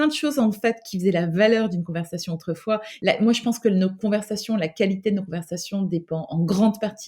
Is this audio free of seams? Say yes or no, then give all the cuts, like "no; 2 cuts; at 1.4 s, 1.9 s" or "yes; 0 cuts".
no; 1 cut; at 2.9 s